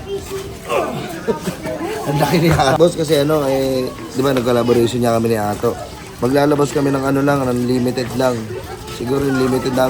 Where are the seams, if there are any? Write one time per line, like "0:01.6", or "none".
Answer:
0:02.8